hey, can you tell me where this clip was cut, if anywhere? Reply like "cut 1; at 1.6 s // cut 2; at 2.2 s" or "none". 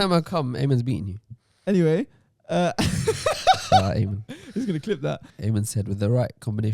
cut 1; at 5.3 s